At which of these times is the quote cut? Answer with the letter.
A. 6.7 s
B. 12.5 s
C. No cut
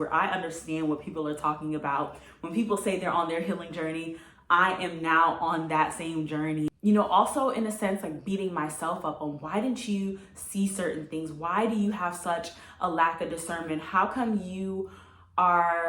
A